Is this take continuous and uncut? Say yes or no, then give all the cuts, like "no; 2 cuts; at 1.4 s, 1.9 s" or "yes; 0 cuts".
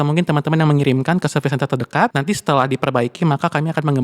no; 1 cut; at 2.1 s